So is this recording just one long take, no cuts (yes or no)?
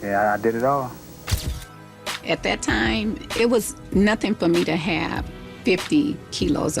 no